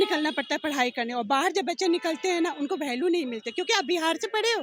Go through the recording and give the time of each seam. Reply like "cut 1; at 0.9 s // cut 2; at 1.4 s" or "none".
none